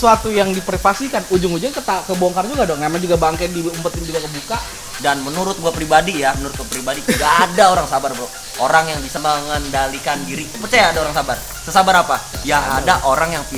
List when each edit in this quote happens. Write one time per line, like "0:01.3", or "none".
0:04.7
0:09.2
0:10.6
0:11.5
0:12.3